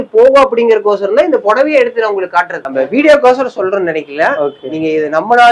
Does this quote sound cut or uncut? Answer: cut